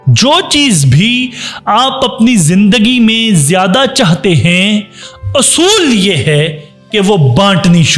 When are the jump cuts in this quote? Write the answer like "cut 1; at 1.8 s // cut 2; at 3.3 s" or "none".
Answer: none